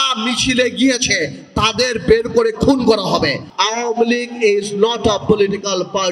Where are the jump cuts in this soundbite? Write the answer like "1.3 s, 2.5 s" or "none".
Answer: 3.5 s